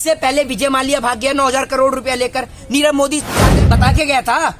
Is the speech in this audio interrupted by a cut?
yes; 1 cut; at 3.5 s

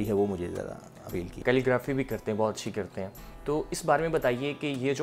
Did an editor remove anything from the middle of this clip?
yes; 1 cut; at 1.3 s

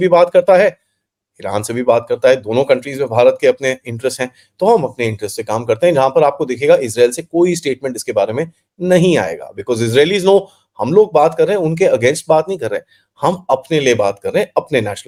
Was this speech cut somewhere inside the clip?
no; 0 cuts

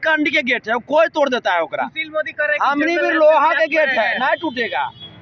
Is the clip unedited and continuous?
yes; 0 cuts

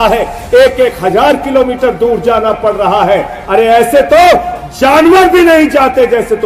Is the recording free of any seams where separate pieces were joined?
yes; 0 cuts

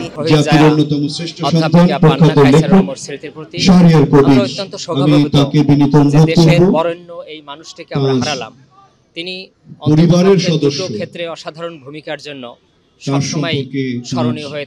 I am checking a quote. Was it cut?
no; 0 cuts

